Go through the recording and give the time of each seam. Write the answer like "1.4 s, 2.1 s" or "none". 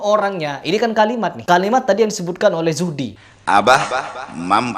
3.1 s